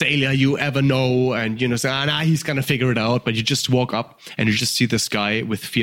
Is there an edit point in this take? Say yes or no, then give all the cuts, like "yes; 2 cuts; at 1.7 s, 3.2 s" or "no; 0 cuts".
no; 0 cuts